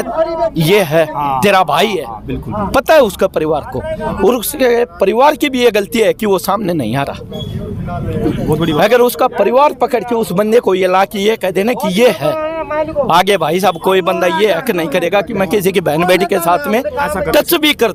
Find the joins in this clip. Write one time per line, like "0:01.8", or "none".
none